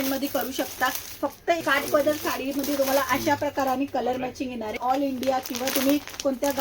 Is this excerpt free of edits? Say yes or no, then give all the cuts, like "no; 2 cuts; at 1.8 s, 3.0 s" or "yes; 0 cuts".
no; 2 cuts; at 1.6 s, 4.8 s